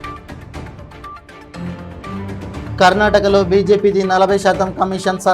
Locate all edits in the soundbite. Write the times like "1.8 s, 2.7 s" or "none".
1.1 s